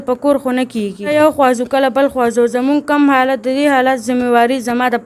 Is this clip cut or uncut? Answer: cut